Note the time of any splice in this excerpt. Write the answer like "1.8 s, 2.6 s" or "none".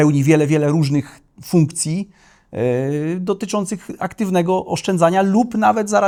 none